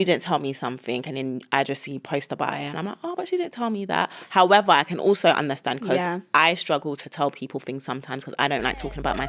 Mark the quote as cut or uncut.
uncut